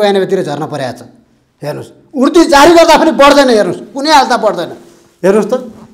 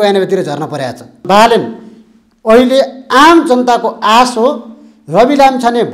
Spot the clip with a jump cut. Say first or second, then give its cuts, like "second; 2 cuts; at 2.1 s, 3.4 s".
second; 1 cut; at 1.2 s